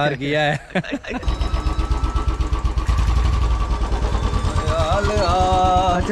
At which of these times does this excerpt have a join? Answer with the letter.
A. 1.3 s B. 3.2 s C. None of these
A